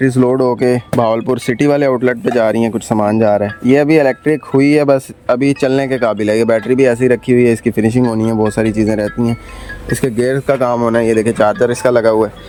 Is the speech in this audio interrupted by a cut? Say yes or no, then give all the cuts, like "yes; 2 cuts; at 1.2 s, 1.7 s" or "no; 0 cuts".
no; 0 cuts